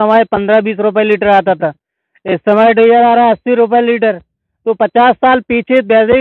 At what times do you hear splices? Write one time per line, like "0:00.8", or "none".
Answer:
none